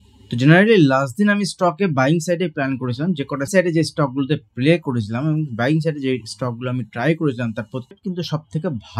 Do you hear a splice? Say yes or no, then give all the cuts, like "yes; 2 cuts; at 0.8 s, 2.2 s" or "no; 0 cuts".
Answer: yes; 2 cuts; at 3.5 s, 7.9 s